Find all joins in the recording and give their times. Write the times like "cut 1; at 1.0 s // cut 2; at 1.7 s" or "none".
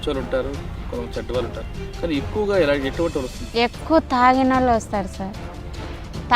cut 1; at 3.4 s